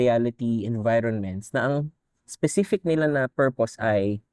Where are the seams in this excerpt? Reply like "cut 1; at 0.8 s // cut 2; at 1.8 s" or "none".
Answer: none